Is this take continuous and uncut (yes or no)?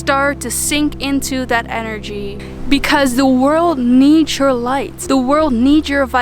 no